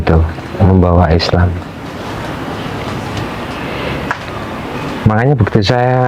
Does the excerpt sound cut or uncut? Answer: uncut